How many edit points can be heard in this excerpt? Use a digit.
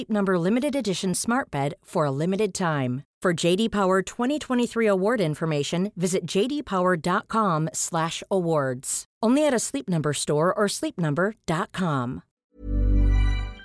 1